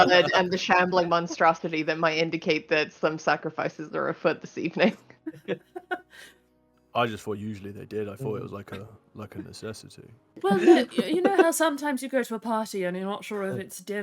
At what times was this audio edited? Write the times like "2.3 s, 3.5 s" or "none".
10.4 s